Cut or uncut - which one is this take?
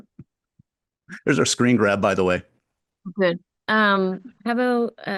uncut